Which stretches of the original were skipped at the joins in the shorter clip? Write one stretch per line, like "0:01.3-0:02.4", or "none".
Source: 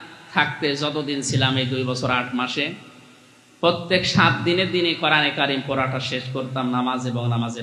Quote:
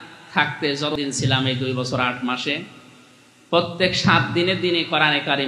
0:00.9-0:01.0